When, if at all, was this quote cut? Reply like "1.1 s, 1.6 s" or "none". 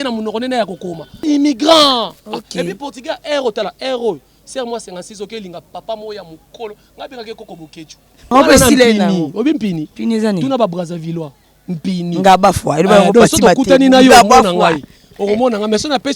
1.2 s, 8.3 s